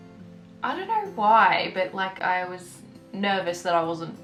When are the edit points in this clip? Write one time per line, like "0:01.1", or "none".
none